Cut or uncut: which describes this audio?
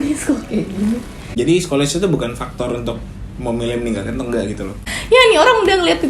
cut